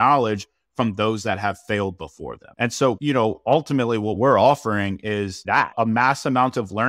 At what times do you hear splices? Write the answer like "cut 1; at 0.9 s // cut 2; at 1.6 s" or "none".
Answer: cut 1; at 2.9 s // cut 2; at 5.7 s